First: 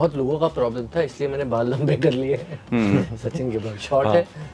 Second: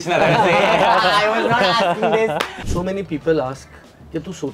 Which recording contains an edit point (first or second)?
second